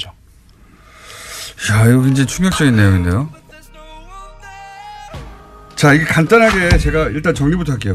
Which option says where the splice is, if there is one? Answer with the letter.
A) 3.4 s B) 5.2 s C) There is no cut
A